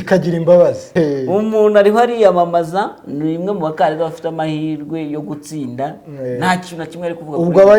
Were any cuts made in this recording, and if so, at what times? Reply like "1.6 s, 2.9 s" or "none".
none